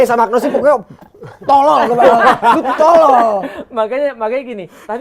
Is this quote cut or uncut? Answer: uncut